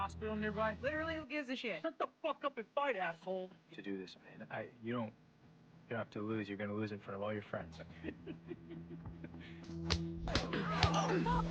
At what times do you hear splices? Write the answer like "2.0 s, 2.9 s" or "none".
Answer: none